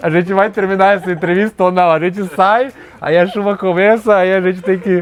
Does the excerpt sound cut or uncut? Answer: uncut